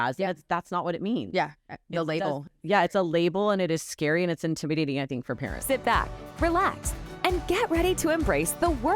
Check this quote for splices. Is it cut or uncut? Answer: cut